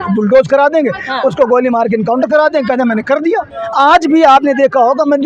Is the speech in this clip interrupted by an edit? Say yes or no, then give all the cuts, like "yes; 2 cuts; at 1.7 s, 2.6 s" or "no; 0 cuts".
yes; 1 cut; at 3.5 s